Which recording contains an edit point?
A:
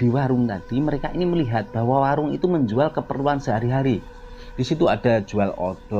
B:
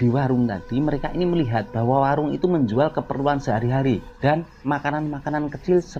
B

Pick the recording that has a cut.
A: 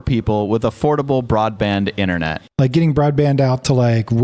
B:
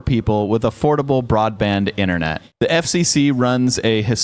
A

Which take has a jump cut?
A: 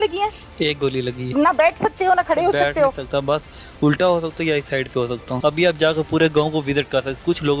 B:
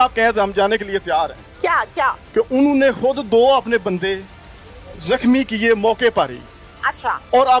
A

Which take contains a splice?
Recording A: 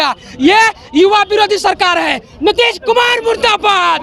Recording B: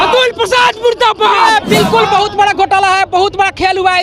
B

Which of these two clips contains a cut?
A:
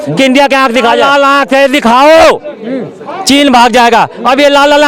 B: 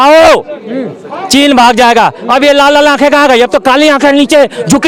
A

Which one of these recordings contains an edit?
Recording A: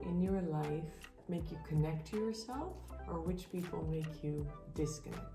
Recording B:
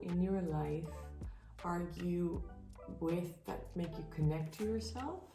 A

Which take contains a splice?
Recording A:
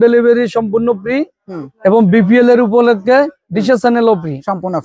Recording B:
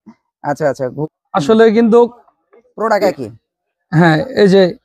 B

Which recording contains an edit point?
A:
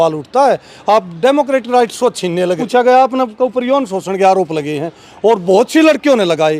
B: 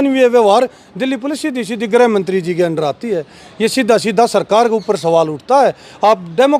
A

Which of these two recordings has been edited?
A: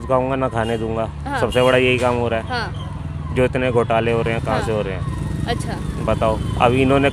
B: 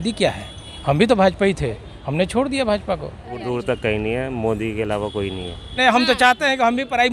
B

